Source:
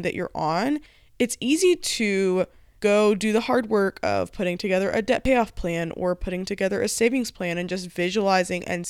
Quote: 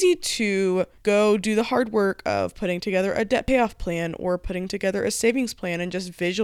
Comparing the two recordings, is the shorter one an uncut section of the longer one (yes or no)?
no